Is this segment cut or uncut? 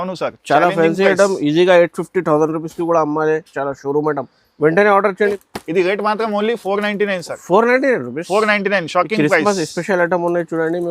cut